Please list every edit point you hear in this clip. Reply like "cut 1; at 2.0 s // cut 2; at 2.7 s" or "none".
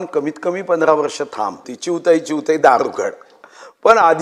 cut 1; at 1.7 s